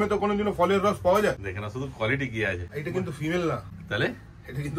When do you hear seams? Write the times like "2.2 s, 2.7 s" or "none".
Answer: 1.4 s, 2.7 s, 3.7 s